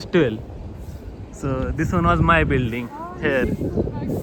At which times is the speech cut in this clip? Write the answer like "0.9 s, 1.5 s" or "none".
none